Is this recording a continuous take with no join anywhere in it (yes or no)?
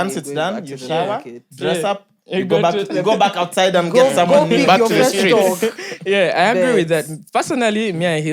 yes